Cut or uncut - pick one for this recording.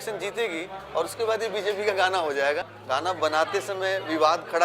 cut